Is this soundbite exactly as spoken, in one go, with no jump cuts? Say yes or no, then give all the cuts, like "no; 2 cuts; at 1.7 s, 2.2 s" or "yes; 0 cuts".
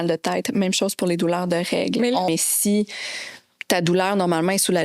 no; 1 cut; at 2.3 s